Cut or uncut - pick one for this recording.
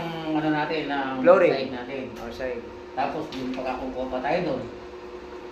uncut